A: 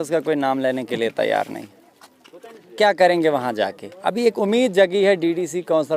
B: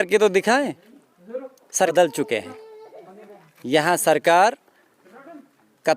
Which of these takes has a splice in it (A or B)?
B